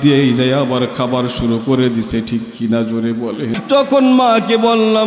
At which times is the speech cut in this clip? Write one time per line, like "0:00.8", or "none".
0:03.6